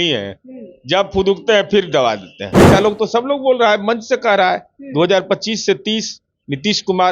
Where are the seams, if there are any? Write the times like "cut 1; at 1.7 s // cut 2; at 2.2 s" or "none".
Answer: cut 1; at 2.7 s